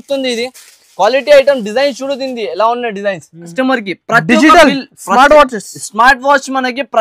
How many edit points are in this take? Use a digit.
1